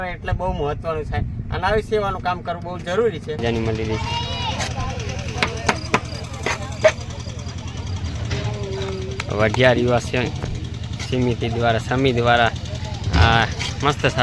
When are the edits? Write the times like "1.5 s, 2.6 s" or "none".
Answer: 3.4 s